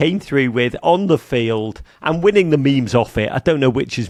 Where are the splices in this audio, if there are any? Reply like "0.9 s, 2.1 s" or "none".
none